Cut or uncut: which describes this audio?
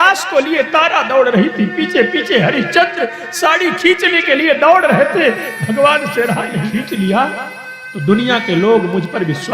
cut